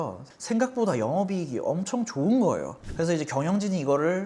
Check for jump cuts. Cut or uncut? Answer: cut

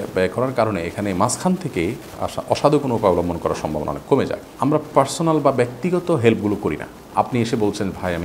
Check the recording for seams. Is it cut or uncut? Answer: cut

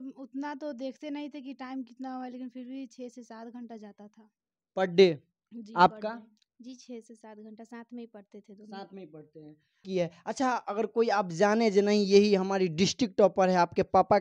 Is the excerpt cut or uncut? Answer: cut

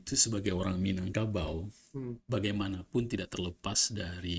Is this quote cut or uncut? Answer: uncut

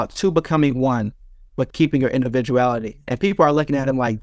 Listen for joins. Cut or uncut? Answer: uncut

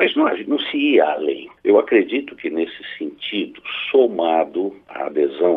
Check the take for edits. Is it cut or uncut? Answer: cut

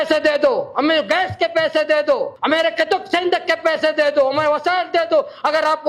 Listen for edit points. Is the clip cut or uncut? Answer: cut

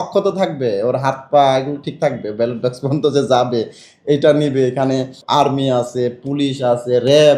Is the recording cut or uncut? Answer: cut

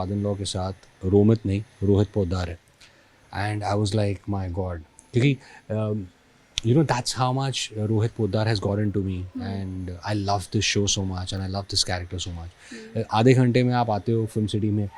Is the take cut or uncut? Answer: uncut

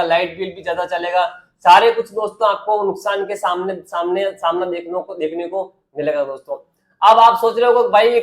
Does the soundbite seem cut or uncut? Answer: uncut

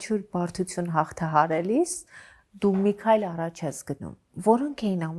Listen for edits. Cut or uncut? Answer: uncut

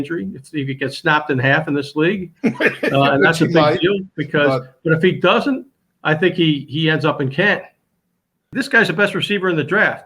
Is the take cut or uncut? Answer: cut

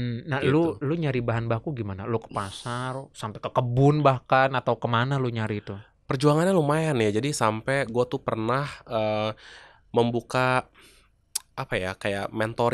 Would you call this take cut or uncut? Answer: uncut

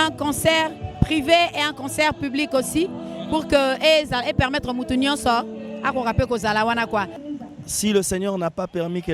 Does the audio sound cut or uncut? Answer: cut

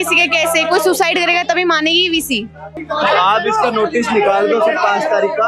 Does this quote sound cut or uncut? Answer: cut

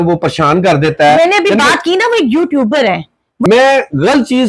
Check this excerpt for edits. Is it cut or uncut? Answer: cut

